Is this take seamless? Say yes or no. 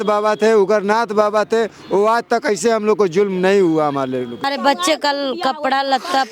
no